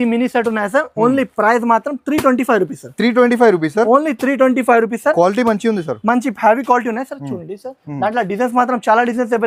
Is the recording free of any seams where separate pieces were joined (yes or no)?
yes